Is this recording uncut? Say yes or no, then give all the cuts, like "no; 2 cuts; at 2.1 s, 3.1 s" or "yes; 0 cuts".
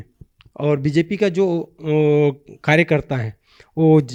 yes; 0 cuts